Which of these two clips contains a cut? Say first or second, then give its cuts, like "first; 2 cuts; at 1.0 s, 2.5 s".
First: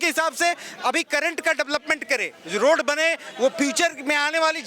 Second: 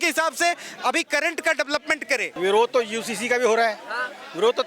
second; 1 cut; at 2.3 s